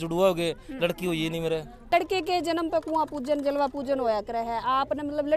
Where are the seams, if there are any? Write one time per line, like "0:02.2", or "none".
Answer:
0:01.9